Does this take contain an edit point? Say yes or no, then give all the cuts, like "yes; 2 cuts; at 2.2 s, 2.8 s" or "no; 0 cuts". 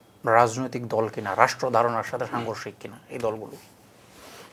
no; 0 cuts